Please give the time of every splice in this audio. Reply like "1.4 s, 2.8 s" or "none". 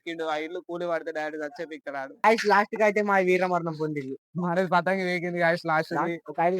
2.2 s